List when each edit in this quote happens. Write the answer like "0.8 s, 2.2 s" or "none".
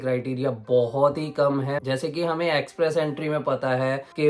none